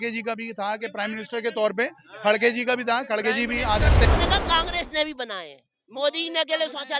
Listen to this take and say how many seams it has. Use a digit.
1